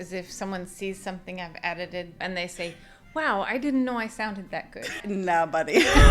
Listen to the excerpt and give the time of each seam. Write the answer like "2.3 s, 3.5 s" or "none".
2.2 s, 5.0 s